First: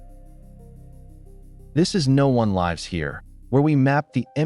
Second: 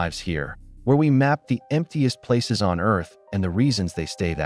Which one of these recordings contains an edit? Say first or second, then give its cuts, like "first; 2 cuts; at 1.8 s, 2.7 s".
first; 1 cut; at 1.7 s